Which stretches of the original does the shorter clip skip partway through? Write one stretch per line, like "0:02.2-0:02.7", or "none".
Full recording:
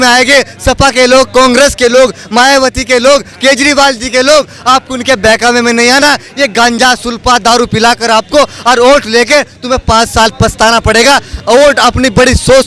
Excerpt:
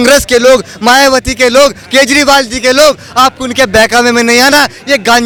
none